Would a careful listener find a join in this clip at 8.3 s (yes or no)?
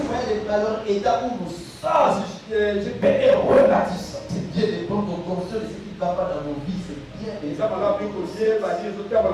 no